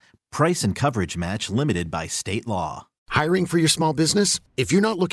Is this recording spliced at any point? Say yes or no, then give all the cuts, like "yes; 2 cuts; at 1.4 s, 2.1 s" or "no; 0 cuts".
yes; 1 cut; at 3.1 s